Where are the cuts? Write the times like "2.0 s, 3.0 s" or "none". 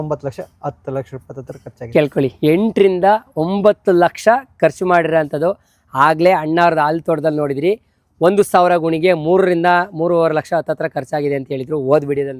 none